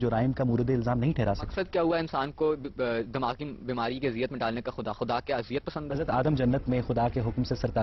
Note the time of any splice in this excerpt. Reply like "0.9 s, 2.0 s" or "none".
1.5 s, 6.0 s